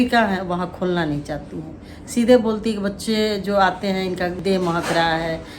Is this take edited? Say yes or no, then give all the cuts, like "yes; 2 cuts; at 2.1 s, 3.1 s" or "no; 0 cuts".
yes; 1 cut; at 4.4 s